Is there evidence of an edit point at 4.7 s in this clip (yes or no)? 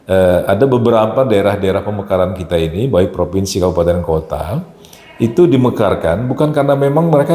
no